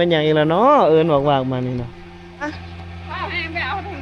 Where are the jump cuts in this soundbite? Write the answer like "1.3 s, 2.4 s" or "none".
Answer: 2.5 s